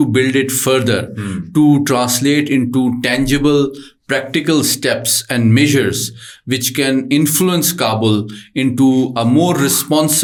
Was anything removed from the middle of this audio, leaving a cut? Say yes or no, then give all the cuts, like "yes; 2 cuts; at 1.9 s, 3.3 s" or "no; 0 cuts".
no; 0 cuts